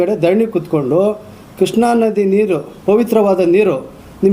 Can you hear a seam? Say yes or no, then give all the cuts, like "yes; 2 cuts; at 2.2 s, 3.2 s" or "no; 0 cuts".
yes; 1 cut; at 2.7 s